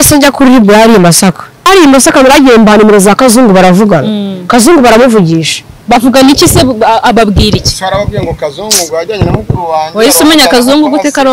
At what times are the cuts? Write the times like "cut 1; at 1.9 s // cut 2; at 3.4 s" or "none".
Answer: cut 1; at 1.7 s